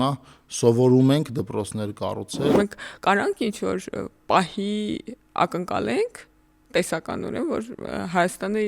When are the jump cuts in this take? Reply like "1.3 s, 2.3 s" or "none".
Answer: 2.5 s